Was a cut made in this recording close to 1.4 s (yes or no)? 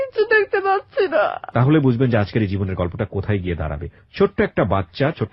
yes